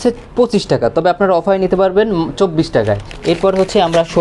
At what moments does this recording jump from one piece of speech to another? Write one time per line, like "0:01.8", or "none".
none